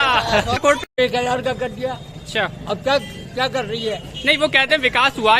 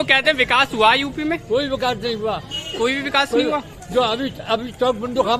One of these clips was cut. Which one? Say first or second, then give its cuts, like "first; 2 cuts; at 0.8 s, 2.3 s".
first; 1 cut; at 1.0 s